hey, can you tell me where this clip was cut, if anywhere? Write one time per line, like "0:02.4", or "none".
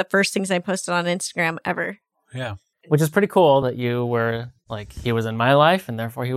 0:02.7